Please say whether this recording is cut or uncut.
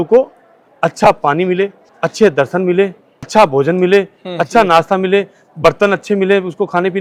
uncut